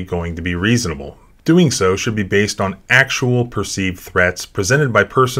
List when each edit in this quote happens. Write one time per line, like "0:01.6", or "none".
none